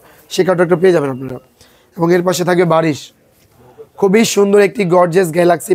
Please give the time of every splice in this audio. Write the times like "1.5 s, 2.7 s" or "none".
none